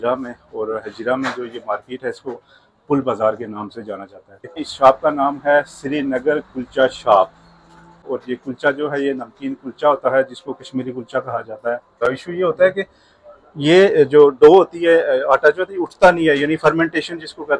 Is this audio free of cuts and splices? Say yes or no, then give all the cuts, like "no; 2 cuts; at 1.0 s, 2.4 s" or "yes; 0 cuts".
no; 3 cuts; at 4.7 s, 8.1 s, 12.0 s